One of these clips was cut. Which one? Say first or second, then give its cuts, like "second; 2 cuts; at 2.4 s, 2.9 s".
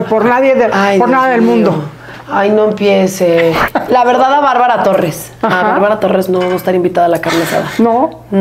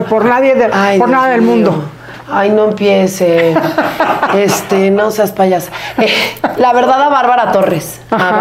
first; 1 cut; at 3.6 s